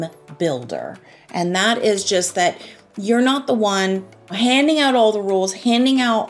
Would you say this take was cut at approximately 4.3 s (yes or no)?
yes